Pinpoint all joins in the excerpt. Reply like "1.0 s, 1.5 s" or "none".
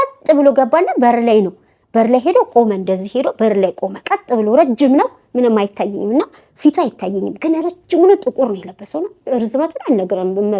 none

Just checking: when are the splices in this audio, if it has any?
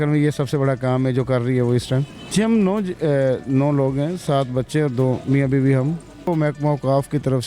2.2 s, 6.3 s

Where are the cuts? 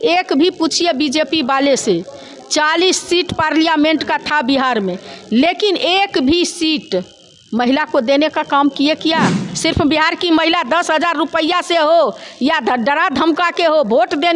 9.5 s

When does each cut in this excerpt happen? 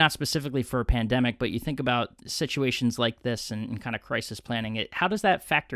none

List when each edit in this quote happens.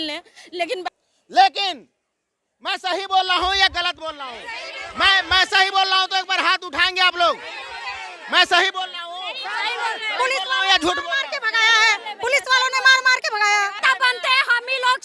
0.9 s, 13.8 s

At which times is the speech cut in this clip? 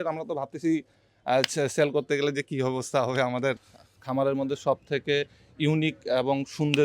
3.6 s

